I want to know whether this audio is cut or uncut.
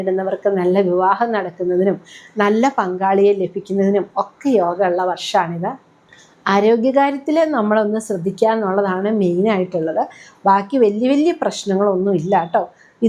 uncut